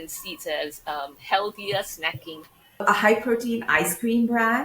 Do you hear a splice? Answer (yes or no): yes